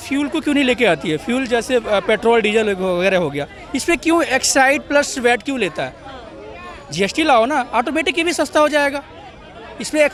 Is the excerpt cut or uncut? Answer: uncut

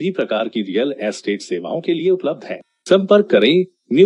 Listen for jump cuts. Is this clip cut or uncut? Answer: uncut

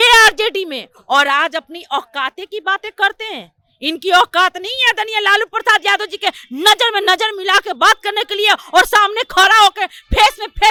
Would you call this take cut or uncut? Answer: uncut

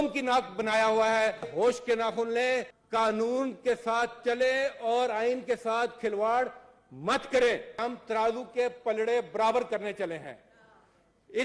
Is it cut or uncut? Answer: cut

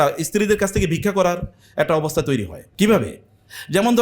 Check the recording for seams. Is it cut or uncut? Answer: cut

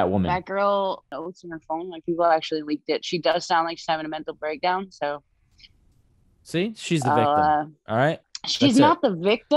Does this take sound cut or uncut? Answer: cut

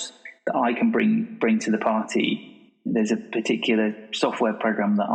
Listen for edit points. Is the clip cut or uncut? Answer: uncut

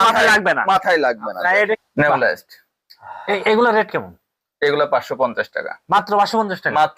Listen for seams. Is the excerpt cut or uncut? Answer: cut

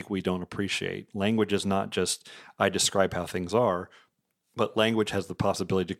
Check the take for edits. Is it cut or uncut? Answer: uncut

